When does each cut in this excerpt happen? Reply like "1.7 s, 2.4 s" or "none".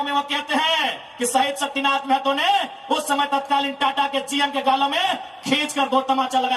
none